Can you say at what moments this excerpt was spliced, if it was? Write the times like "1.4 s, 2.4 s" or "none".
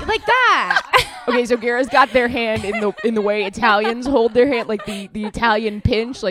none